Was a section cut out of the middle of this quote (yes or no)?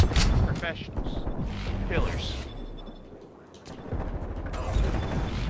no